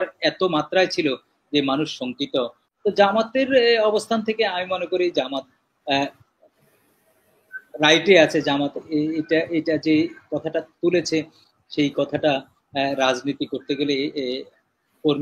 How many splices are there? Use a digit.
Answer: 1